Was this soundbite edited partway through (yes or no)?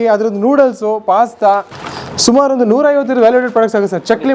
no